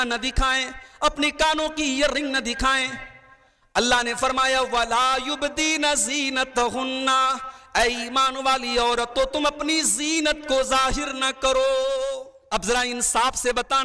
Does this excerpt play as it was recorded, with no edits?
no; 1 cut; at 12.3 s

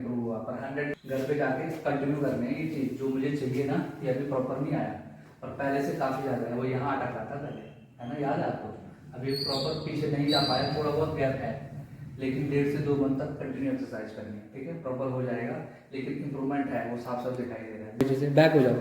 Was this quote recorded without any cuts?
no; 2 cuts; at 0.9 s, 18.0 s

